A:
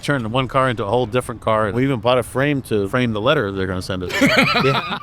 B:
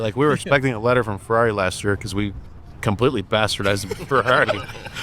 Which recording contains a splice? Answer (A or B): A